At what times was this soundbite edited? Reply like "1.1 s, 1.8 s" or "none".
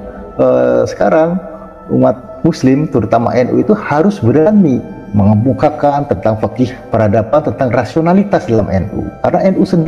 2.3 s, 5.0 s